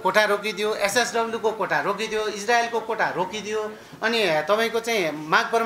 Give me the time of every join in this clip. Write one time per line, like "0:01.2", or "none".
none